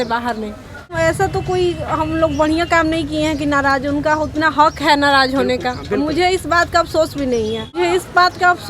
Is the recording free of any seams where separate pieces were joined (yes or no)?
no